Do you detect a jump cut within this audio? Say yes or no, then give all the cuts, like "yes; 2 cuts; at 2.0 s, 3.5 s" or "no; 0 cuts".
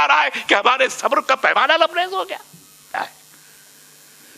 yes; 1 cut; at 2.9 s